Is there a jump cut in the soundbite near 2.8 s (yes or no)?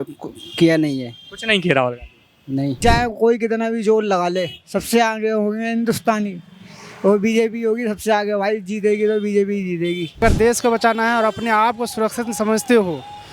yes